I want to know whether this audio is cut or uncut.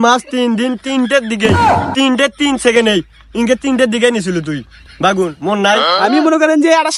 cut